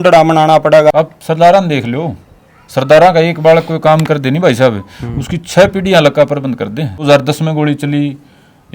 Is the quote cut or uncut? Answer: cut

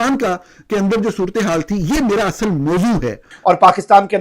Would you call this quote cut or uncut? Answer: cut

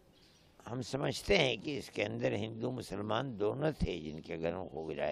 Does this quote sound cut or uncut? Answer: uncut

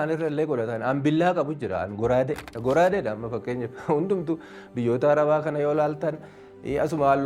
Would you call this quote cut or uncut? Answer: cut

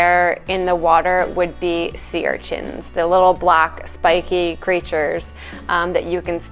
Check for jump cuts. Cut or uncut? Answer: uncut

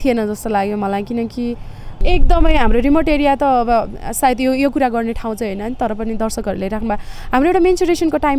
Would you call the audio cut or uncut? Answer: cut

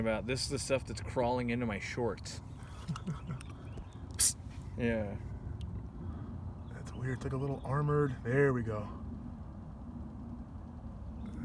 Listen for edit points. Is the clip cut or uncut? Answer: uncut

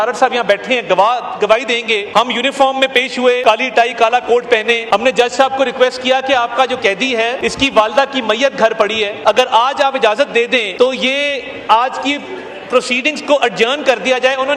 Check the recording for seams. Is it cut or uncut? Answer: cut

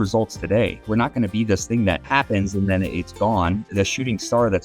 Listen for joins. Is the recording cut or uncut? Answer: cut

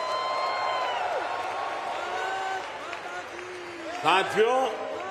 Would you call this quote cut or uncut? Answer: uncut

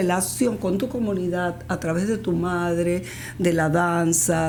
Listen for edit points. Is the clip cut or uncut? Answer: uncut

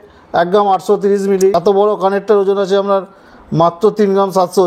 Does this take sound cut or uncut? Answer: cut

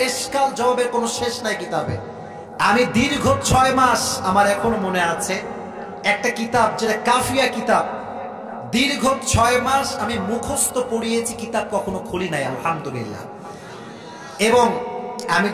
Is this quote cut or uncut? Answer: uncut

